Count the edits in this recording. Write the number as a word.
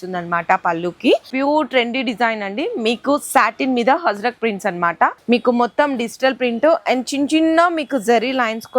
two